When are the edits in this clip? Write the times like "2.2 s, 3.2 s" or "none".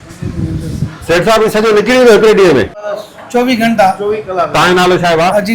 2.8 s